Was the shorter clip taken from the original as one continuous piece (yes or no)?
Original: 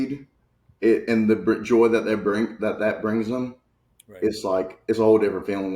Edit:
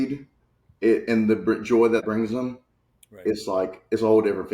no